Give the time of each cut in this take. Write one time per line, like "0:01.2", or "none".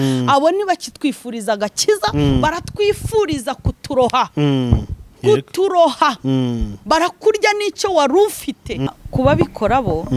0:08.8